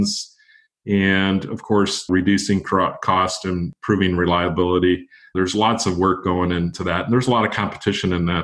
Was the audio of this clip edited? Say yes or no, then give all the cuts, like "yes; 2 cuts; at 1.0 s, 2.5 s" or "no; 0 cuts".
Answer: yes; 4 cuts; at 2.1 s, 3.7 s, 5.2 s, 6.8 s